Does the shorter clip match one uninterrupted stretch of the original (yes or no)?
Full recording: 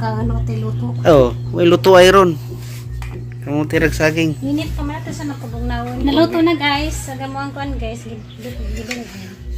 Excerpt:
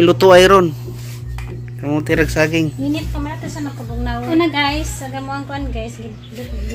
no